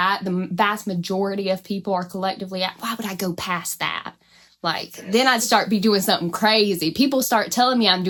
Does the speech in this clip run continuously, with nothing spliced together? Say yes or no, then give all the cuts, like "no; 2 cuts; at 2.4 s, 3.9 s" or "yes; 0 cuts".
yes; 0 cuts